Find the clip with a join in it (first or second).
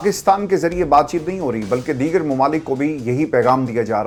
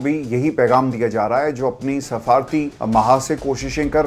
second